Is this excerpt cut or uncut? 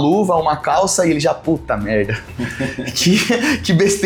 uncut